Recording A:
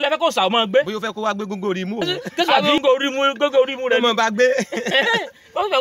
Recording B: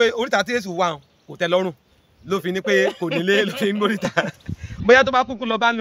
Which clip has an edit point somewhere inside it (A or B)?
A